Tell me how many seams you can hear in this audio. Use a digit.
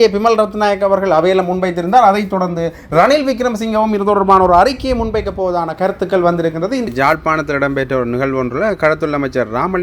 1